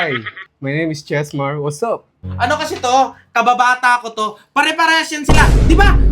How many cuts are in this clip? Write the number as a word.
one